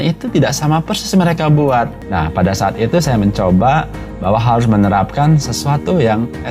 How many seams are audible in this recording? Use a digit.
1